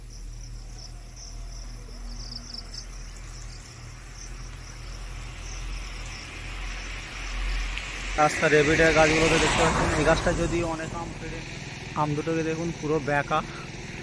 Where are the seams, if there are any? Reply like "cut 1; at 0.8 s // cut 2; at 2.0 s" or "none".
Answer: none